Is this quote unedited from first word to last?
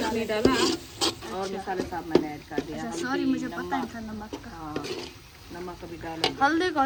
yes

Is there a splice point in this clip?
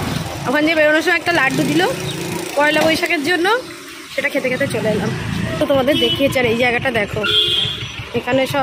yes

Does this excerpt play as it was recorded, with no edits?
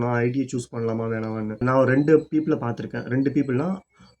no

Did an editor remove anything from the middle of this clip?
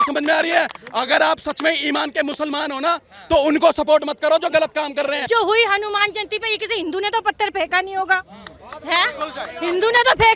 yes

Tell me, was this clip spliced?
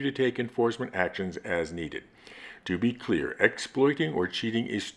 yes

